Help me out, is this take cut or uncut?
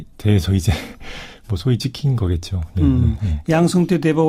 uncut